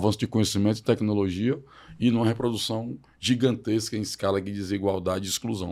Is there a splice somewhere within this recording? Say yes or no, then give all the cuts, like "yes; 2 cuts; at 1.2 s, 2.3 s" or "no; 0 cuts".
no; 0 cuts